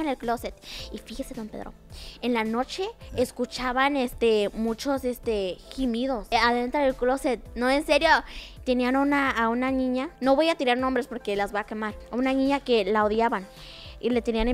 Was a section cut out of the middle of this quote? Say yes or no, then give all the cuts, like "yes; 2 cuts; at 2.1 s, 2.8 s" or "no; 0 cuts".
yes; 1 cut; at 8.5 s